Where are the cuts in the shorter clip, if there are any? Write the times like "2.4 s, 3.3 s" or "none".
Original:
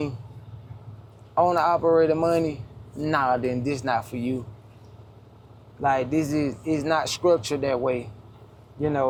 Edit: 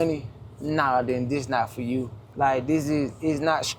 2.2 s

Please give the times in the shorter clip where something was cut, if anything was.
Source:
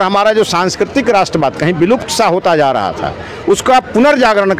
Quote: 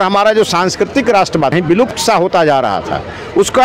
1.5 s

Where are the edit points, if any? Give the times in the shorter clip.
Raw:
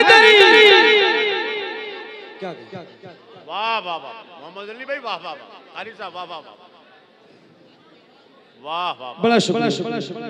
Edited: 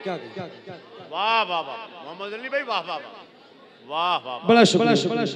3.2 s

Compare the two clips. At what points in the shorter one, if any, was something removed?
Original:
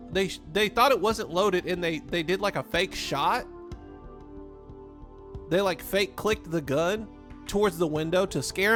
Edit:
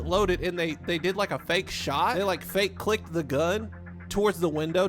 2.2 s

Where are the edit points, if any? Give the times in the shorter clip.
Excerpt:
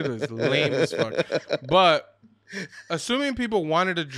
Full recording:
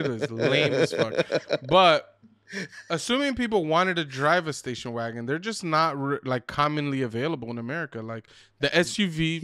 none

